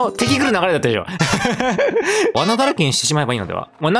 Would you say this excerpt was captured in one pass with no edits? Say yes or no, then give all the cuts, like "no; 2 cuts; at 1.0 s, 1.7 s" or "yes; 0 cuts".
no; 1 cut; at 2.3 s